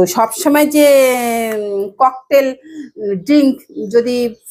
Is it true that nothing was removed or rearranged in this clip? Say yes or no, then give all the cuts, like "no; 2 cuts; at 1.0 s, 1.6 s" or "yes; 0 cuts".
yes; 0 cuts